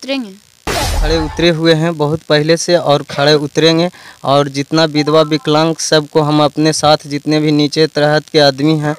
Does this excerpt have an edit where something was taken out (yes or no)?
yes